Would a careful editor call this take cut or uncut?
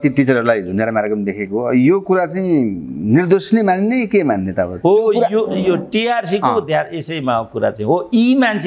uncut